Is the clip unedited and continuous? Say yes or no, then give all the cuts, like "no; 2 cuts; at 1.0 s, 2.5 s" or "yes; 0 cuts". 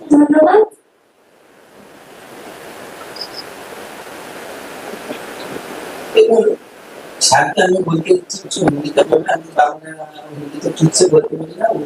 yes; 0 cuts